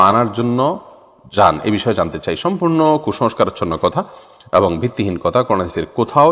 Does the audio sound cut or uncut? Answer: uncut